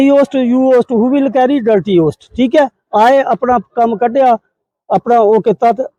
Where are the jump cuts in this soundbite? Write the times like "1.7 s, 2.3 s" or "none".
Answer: none